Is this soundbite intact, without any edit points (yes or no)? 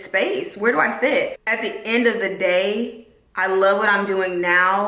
no